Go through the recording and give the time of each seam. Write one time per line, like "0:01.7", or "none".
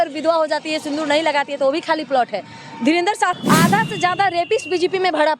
0:03.4